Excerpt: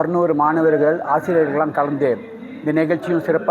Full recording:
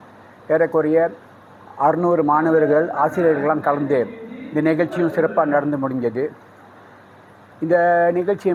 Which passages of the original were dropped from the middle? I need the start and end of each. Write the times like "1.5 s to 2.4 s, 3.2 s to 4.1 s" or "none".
none